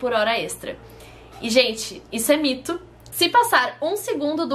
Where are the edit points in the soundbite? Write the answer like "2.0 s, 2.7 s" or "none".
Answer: 3.0 s